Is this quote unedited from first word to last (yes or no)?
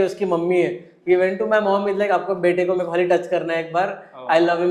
yes